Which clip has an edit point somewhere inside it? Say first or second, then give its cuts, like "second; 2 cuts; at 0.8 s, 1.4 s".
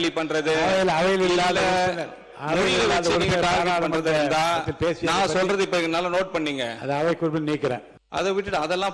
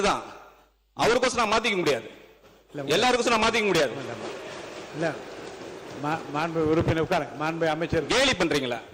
first; 1 cut; at 8.0 s